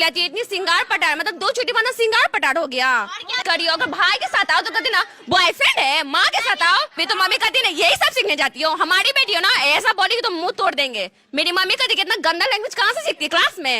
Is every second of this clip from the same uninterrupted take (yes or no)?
no